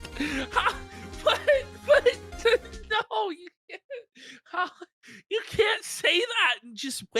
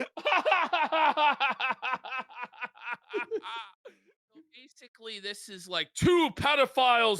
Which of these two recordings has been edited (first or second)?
second